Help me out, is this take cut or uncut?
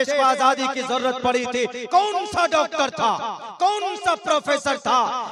uncut